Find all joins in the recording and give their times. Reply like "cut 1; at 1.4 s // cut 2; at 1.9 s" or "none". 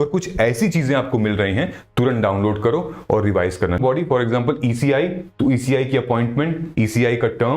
cut 1; at 3.8 s